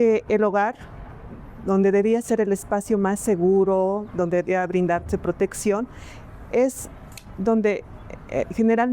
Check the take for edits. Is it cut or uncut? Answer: uncut